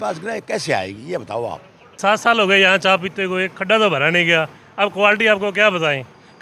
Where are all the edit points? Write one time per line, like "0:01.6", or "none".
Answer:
0:02.0